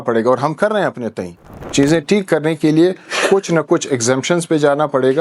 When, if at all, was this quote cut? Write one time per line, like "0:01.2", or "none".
0:01.6